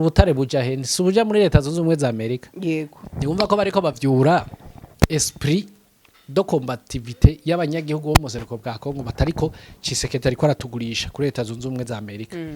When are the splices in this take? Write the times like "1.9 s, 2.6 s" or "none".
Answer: 3.0 s